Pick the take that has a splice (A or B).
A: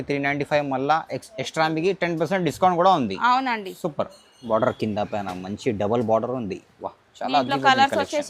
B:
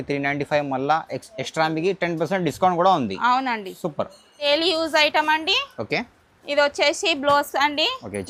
A